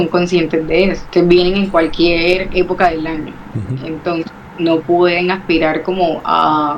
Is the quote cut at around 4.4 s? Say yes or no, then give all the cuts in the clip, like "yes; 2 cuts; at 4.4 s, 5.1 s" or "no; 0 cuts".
no; 1 cut; at 1.0 s